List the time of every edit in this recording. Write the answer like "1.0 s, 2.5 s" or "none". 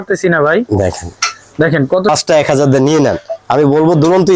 2.1 s